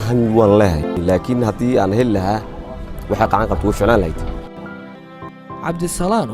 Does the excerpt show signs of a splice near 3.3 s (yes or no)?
no